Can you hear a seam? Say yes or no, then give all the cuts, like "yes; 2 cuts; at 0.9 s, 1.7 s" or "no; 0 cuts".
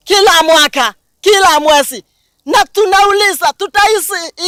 no; 0 cuts